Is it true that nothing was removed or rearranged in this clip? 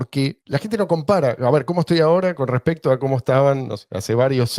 yes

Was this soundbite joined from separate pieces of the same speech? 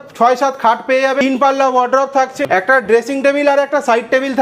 yes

